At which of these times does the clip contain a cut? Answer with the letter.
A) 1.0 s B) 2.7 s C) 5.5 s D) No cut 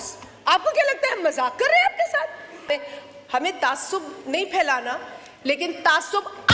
B